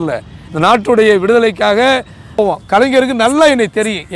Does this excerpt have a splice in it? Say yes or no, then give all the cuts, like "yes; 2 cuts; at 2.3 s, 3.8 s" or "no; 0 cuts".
yes; 1 cut; at 2.4 s